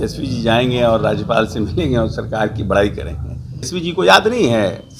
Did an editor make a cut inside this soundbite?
yes; 1 cut; at 3.7 s

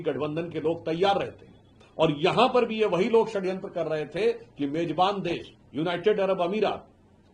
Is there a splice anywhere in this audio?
no; 0 cuts

